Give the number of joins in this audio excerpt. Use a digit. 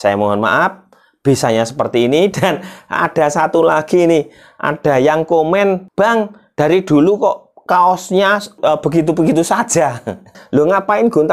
3